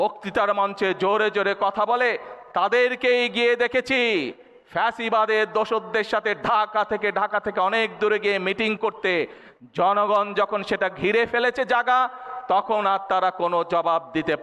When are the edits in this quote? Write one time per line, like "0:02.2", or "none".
none